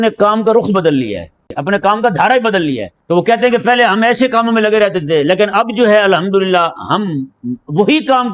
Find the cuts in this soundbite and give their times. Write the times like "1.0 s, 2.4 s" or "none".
1.6 s, 2.9 s